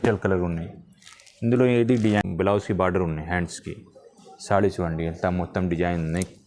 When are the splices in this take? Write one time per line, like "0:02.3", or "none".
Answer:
0:02.2